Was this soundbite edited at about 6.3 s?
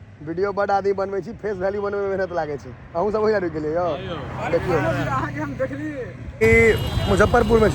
yes; 1 cut; at 6.3 s

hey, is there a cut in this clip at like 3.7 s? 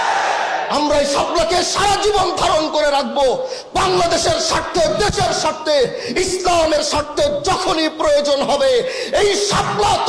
no; 0 cuts

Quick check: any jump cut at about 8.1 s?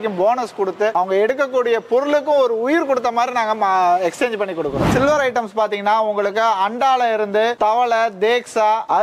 no; 2 cuts; at 0.9 s, 4.9 s

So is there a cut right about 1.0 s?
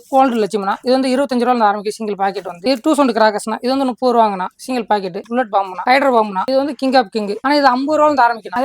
no; 1 cut; at 7.4 s

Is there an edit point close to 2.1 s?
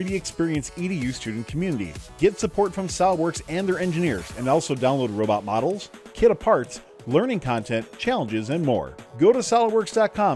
no; 0 cuts

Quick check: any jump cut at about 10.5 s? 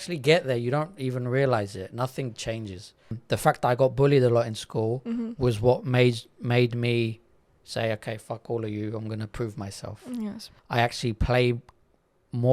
yes; 2 cuts; at 3.1 s, 10.5 s

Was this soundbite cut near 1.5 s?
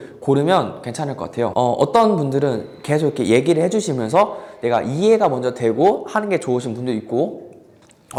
no; 0 cuts

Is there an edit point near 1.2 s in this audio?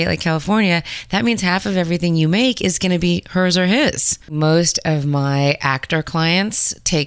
no; 1 cut; at 4.3 s

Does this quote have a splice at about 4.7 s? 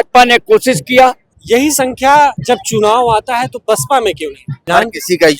yes; 3 cuts; at 1.3 s, 2.4 s, 4.7 s

